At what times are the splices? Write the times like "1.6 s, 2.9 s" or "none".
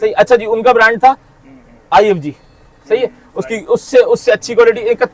none

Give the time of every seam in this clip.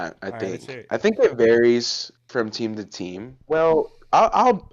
3.4 s

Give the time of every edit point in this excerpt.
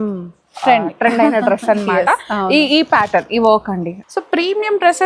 3.9 s

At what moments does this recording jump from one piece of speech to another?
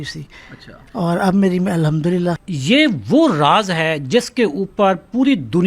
2.5 s

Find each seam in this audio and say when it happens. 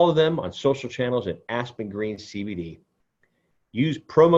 none

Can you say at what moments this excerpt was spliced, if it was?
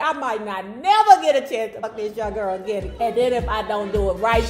1.8 s

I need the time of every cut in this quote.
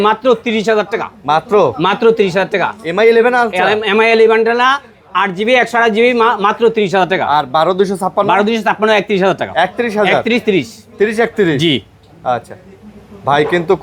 none

